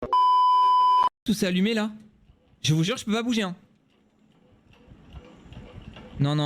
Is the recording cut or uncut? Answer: cut